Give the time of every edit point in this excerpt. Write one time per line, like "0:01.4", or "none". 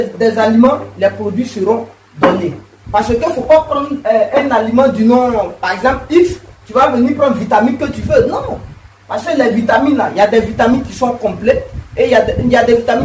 none

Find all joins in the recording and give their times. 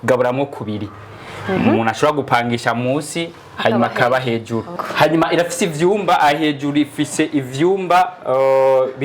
0:04.8

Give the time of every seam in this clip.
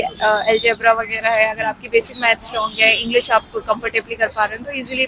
none

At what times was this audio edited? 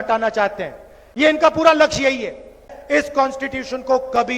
0:02.7

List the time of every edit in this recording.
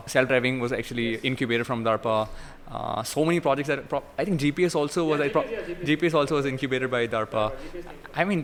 none

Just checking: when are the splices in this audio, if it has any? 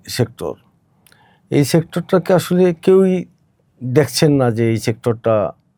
none

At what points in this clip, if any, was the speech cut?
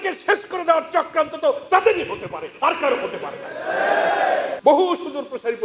0:04.5

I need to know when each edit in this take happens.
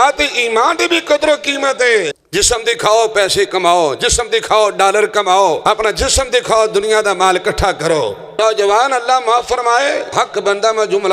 0:02.2
0:05.6
0:08.4
0:10.1

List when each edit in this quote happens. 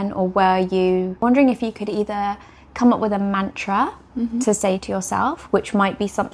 0:01.2

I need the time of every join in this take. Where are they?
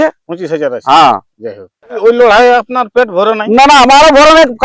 0:02.0

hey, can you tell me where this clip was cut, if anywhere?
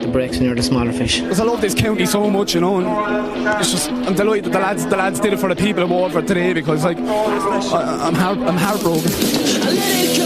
none

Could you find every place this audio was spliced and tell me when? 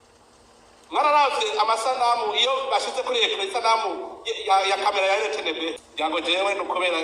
0:05.8

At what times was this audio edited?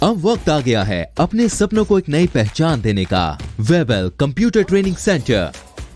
0:03.4

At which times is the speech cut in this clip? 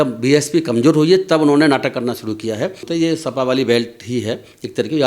0:02.9

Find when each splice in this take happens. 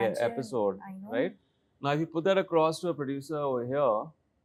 none

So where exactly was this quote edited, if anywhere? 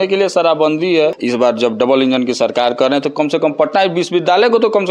0:01.2

